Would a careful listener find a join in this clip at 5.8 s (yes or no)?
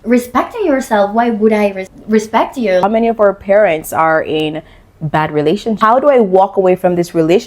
yes